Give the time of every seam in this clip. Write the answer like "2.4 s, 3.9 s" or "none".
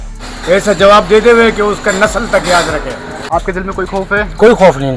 3.1 s